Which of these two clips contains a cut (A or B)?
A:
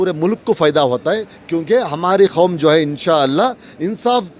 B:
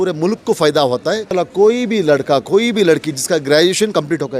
B